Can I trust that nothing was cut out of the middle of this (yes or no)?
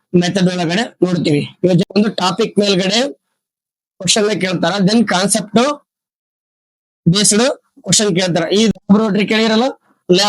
no